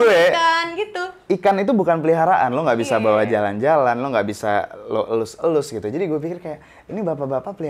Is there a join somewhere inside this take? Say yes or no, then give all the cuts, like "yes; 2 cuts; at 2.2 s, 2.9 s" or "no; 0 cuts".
no; 0 cuts